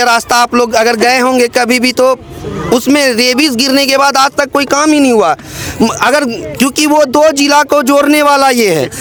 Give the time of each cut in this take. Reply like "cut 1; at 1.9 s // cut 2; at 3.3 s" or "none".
none